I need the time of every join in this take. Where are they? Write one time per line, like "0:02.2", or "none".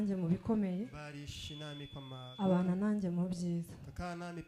none